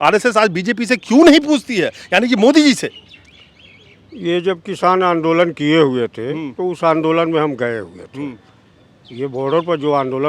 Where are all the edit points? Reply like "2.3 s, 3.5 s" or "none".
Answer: none